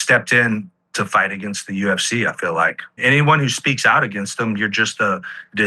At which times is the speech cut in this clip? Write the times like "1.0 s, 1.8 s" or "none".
3.0 s